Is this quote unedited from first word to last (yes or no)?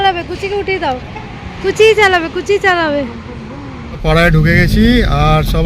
no